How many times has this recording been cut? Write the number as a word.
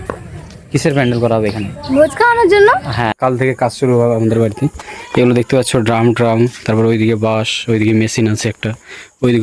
one